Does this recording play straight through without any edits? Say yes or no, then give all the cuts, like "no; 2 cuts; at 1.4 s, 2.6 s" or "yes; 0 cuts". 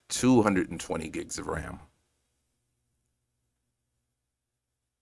yes; 0 cuts